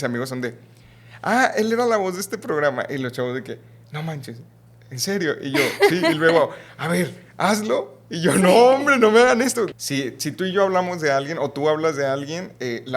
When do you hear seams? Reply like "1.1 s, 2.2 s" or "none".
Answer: 9.8 s